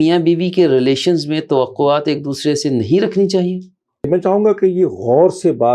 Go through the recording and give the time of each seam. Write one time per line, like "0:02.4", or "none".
0:04.1